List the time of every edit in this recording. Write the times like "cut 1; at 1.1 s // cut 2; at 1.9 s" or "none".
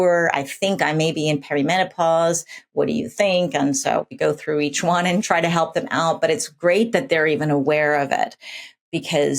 cut 1; at 4.2 s // cut 2; at 5.2 s